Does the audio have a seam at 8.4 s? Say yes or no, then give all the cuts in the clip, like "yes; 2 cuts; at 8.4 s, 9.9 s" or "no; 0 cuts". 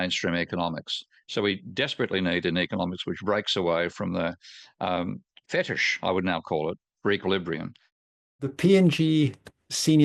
yes; 1 cut; at 8.4 s